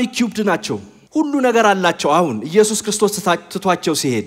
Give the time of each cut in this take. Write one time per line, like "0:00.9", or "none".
0:00.9